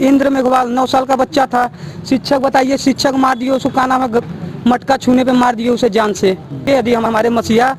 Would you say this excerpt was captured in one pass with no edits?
no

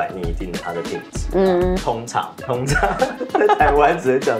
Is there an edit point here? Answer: no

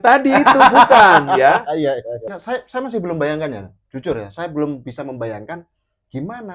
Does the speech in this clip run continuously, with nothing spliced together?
no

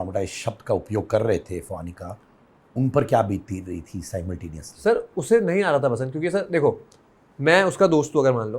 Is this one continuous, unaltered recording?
yes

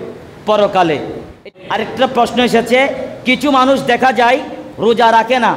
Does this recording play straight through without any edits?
no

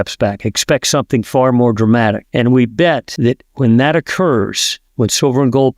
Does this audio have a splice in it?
yes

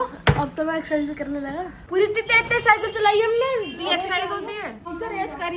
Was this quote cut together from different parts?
yes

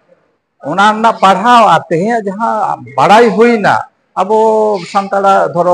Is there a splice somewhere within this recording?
no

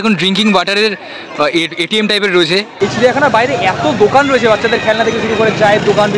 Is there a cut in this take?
yes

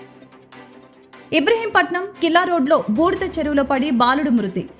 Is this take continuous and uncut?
no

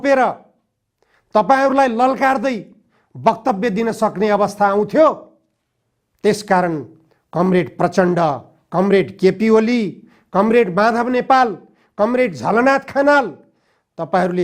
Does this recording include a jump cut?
no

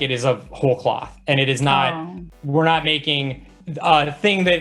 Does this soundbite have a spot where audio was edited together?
no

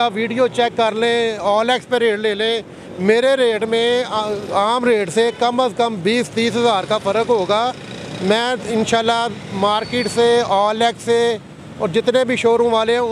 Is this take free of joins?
yes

